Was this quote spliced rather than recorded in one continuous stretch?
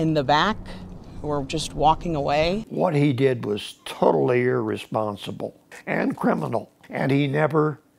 yes; 3 cuts; at 2.7 s, 5.7 s, 6.8 s

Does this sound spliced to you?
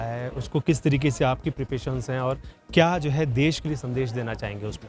no; 0 cuts

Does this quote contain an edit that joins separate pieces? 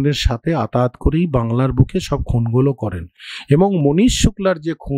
no; 0 cuts

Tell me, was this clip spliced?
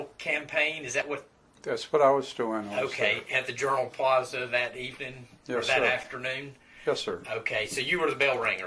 no; 0 cuts

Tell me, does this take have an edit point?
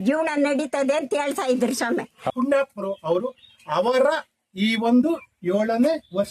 yes; 1 cut; at 2.2 s

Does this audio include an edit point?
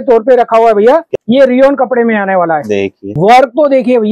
yes; 2 cuts; at 1.1 s, 3.0 s

